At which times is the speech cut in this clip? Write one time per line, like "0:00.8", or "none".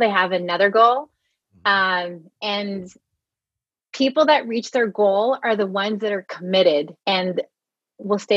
0:06.9